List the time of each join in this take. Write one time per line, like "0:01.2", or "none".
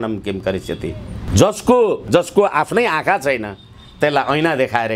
0:01.2
0:02.1